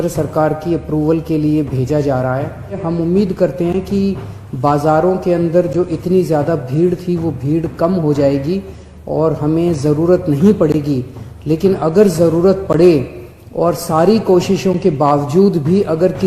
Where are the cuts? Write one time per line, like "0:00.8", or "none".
0:02.8

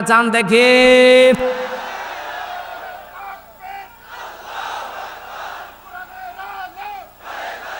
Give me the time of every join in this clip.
0:01.7

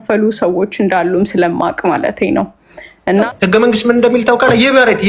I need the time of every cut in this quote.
0:03.3

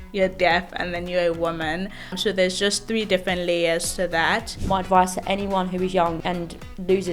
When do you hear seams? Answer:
0:02.1
0:04.5
0:06.2

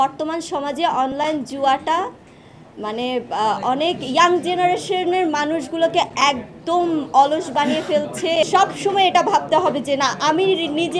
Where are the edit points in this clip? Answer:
0:08.5

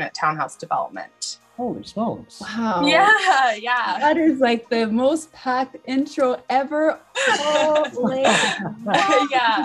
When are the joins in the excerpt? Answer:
none

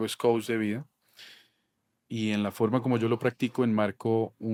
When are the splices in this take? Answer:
none

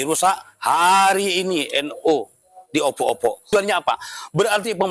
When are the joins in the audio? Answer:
0:03.5

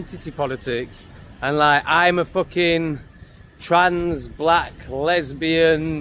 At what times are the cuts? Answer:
none

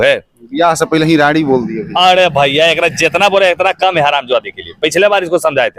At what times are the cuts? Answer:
none

